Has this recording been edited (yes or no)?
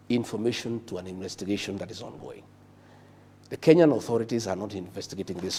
no